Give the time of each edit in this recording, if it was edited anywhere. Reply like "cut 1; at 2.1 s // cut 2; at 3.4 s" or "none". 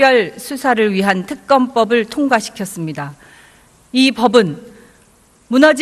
none